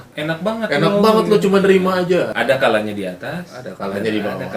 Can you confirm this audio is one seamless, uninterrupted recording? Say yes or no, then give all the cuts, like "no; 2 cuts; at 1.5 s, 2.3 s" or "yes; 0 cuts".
no; 1 cut; at 2.3 s